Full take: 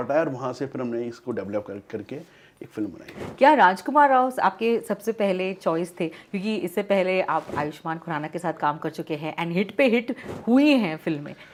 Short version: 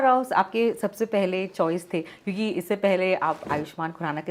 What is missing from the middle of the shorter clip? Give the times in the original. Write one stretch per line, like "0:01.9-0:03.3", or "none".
none